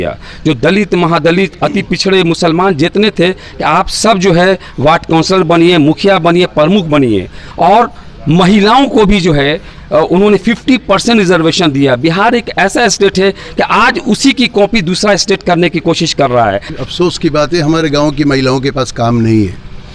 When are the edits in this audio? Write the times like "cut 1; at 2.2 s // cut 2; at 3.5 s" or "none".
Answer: cut 1; at 16.7 s